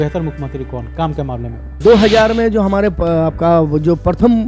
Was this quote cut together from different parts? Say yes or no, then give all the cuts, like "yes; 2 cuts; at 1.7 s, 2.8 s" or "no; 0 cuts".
yes; 1 cut; at 1.8 s